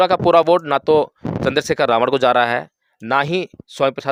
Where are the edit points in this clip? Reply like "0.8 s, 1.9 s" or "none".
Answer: none